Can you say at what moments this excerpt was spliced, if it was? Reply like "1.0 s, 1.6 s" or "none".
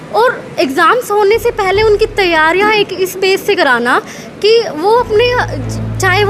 none